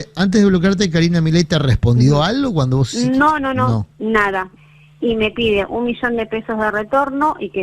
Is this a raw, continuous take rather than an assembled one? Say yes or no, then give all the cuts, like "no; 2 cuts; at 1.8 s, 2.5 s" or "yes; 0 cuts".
no; 1 cut; at 4.6 s